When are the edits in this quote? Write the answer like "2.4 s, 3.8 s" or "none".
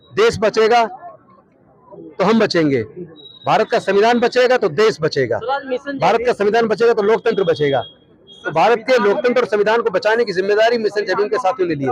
none